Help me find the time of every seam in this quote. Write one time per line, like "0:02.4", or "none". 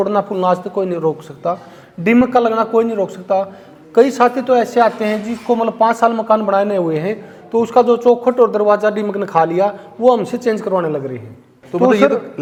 none